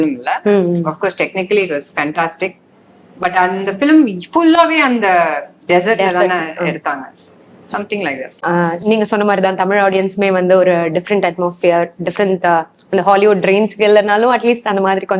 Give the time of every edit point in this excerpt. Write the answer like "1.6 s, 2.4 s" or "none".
none